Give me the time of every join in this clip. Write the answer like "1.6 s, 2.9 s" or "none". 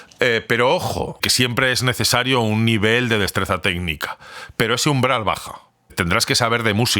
1.3 s, 5.9 s